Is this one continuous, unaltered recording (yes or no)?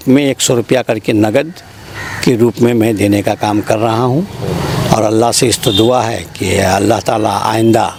yes